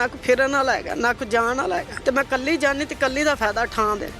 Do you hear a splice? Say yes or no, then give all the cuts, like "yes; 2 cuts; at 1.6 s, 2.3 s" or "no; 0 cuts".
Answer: yes; 1 cut; at 1.9 s